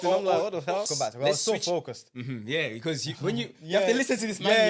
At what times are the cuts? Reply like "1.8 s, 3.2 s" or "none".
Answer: 0.9 s